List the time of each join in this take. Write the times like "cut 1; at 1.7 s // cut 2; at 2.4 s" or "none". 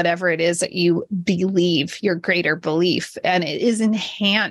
none